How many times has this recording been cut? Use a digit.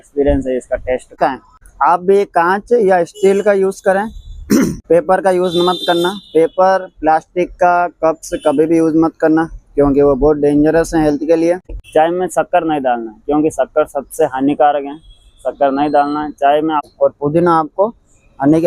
3